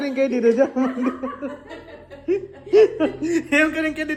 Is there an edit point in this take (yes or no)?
no